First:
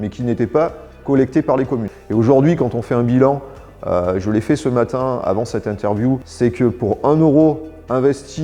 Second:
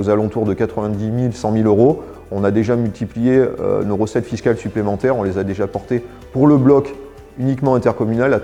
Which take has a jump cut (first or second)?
first